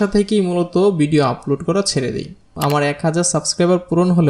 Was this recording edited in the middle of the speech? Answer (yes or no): yes